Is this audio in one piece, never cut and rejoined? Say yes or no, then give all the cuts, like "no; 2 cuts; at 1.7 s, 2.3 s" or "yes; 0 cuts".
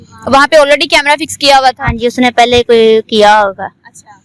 yes; 0 cuts